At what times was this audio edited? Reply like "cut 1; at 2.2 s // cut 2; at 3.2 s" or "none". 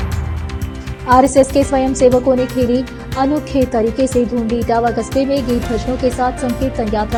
none